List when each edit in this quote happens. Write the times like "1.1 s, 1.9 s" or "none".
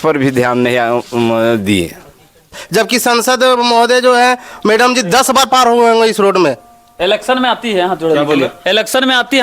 2.5 s